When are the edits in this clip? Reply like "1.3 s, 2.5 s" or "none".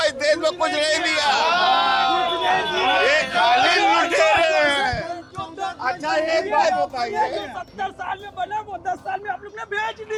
none